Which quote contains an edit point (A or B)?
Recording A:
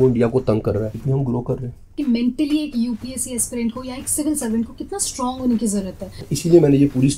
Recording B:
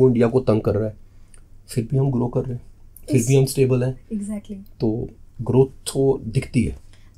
A